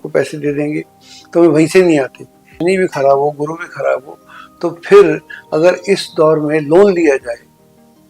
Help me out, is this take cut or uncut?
cut